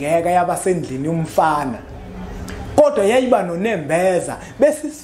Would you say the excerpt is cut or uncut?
uncut